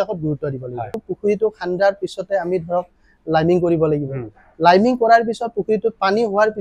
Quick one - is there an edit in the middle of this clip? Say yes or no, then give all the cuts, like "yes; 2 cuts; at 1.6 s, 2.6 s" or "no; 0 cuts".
yes; 1 cut; at 1.0 s